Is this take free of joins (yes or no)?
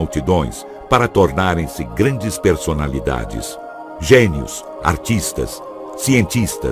yes